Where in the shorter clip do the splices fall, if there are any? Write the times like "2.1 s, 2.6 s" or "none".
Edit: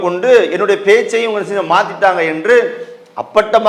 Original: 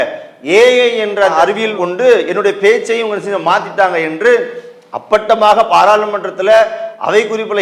none